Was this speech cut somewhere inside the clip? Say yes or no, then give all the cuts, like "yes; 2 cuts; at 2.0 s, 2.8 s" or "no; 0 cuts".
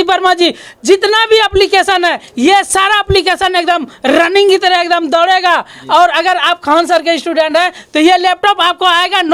no; 0 cuts